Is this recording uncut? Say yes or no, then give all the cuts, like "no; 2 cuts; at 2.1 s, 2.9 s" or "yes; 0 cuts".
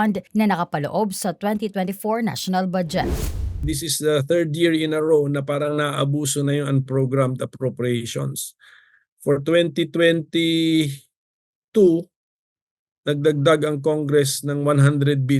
no; 1 cut; at 3.2 s